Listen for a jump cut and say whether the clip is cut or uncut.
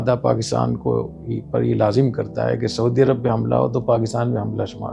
uncut